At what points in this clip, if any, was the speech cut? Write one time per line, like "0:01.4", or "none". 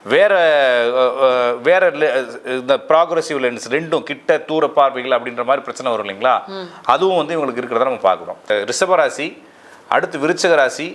0:08.5